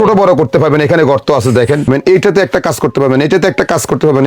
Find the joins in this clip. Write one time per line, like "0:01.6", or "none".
0:01.9